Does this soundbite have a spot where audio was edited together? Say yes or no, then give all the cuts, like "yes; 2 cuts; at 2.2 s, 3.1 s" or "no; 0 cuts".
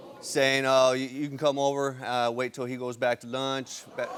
no; 0 cuts